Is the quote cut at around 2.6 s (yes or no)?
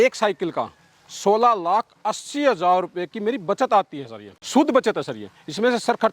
no